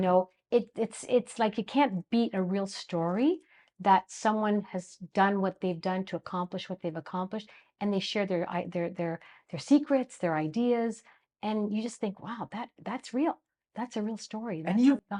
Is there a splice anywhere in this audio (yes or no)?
no